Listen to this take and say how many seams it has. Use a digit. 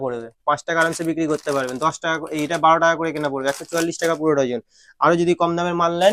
0